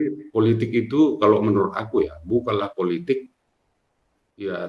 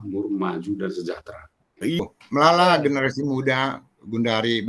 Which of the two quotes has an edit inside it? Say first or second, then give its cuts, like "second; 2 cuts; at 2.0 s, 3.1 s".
second; 1 cut; at 2.0 s